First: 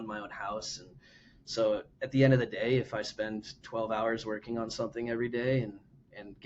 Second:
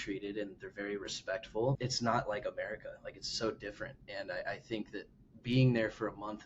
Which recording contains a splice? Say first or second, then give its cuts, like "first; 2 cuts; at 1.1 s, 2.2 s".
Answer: second; 1 cut; at 1.8 s